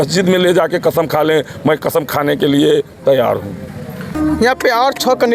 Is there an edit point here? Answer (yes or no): yes